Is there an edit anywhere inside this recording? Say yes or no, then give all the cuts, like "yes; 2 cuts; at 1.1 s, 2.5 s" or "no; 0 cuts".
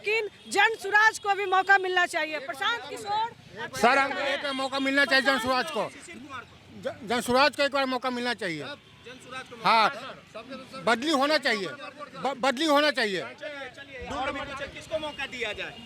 no; 0 cuts